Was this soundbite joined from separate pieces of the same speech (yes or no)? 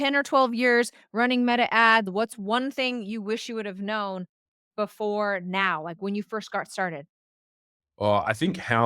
yes